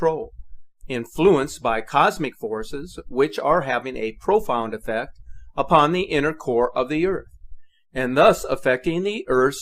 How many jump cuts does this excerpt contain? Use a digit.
1